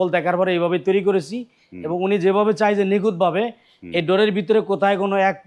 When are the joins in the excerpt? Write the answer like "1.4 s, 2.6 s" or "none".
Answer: none